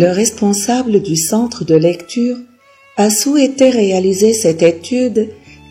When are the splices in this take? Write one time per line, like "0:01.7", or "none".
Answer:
none